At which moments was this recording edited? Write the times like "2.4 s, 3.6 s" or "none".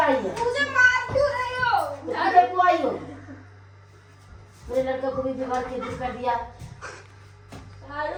none